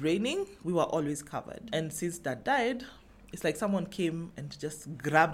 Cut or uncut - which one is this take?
uncut